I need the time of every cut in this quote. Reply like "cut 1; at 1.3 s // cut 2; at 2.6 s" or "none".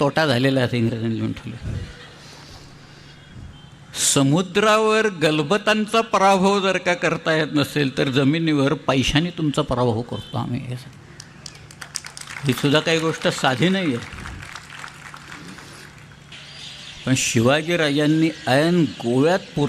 cut 1; at 16.3 s

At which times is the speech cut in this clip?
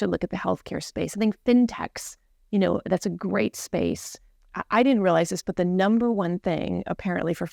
cut 1; at 4.3 s

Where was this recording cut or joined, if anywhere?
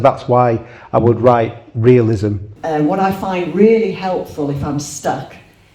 cut 1; at 2.5 s

